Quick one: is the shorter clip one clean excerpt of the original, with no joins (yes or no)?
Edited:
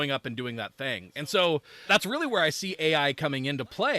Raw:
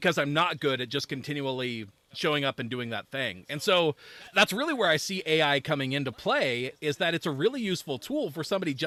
no